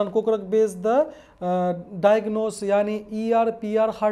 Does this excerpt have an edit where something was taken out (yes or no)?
no